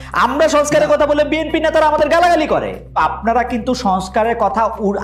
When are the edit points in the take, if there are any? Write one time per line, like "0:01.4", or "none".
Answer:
0:03.0